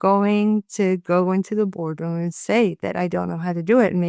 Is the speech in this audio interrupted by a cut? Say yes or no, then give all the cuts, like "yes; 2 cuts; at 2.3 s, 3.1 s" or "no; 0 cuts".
no; 0 cuts